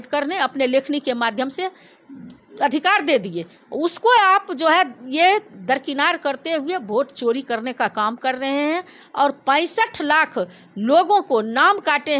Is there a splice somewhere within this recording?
no; 0 cuts

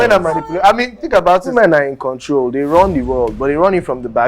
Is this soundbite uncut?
no; 1 cut; at 1.5 s

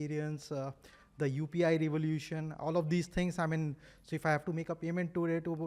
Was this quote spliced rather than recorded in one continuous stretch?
no; 0 cuts

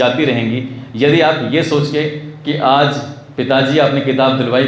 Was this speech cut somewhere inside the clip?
no; 0 cuts

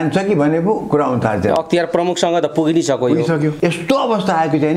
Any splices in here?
yes; 1 cut; at 3.5 s

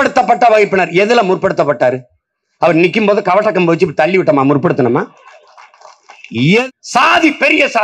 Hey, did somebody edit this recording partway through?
yes; 1 cut; at 6.6 s

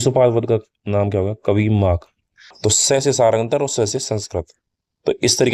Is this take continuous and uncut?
no; 1 cut; at 2.6 s

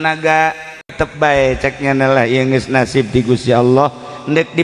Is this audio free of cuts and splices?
no; 1 cut; at 0.9 s

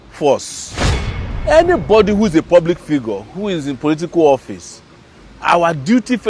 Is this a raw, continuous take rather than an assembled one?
no; 1 cut; at 1.1 s

